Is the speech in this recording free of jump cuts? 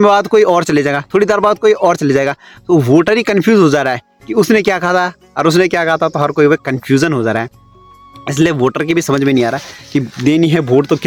yes; 0 cuts

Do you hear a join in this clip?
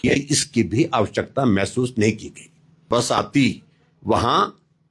yes; 1 cut; at 2.9 s

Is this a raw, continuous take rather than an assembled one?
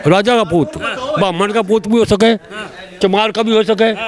yes; 0 cuts

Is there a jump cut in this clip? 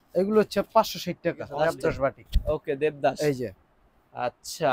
yes; 1 cut; at 1.5 s

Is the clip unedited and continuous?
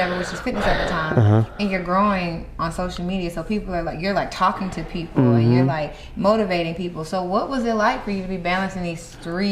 yes; 0 cuts

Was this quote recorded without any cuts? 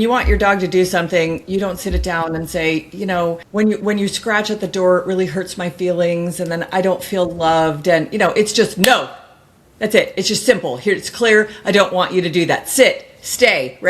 no; 1 cut; at 3.4 s

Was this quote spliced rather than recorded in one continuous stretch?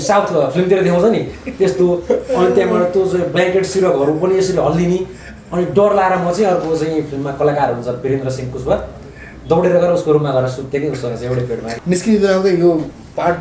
yes; 1 cut; at 11.7 s

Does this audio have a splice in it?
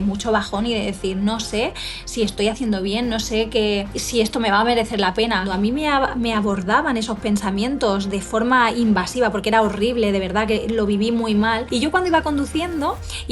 yes; 3 cuts; at 4.0 s, 5.5 s, 11.6 s

